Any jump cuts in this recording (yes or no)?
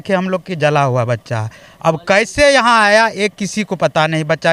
no